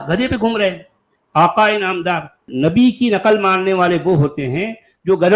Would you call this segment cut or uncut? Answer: cut